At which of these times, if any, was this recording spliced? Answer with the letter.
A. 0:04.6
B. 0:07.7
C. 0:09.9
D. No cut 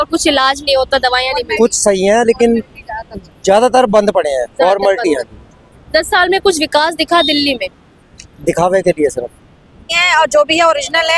C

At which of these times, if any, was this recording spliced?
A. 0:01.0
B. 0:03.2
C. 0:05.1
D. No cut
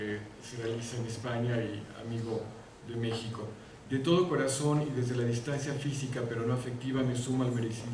D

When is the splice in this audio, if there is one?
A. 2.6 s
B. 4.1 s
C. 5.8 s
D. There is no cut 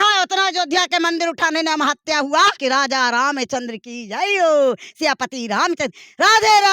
A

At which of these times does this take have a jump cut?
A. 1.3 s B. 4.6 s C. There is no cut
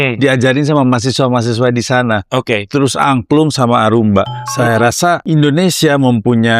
B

